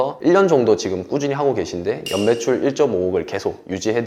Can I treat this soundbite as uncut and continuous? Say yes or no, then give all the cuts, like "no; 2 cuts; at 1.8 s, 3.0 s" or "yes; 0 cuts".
yes; 0 cuts